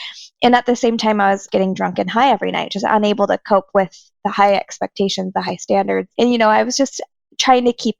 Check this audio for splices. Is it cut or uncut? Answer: cut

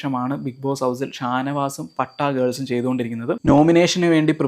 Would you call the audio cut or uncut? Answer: cut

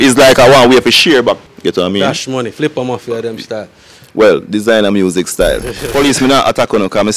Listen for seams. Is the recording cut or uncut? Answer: cut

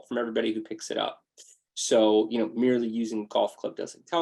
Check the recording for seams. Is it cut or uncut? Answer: uncut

